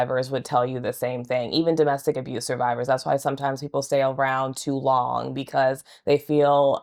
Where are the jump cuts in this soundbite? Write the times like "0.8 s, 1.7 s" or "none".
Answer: none

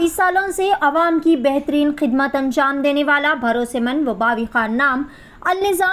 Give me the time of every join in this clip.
none

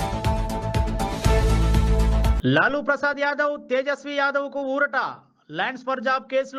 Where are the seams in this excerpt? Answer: none

